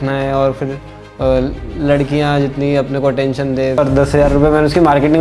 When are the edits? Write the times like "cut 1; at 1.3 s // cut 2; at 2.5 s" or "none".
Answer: cut 1; at 3.8 s